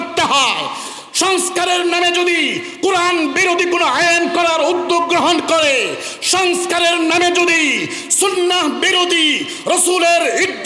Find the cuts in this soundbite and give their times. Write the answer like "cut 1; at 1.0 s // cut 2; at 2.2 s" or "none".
none